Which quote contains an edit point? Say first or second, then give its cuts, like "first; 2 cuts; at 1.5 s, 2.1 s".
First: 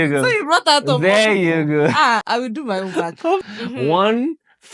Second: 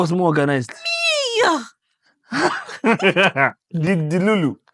first; 2 cuts; at 2.2 s, 3.4 s